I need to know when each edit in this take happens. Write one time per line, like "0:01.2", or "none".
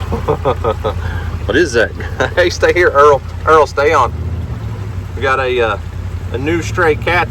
none